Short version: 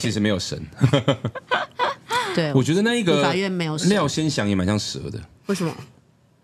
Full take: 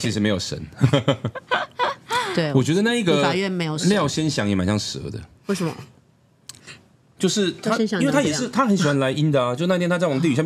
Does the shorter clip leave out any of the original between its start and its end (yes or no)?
no